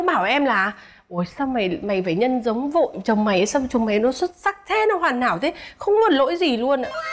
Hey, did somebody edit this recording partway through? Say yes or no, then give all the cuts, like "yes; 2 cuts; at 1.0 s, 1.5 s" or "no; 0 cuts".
no; 0 cuts